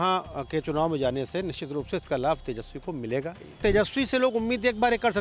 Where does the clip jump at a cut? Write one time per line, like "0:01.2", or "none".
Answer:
0:03.6